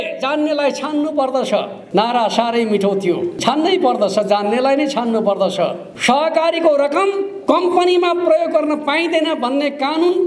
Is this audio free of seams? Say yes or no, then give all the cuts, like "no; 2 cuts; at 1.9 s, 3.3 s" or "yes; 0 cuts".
no; 4 cuts; at 1.8 s, 3.4 s, 5.9 s, 7.3 s